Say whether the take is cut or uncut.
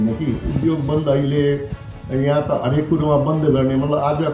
uncut